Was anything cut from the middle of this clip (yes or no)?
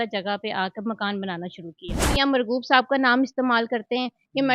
yes